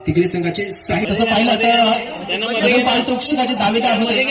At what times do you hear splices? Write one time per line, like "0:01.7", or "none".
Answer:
0:01.1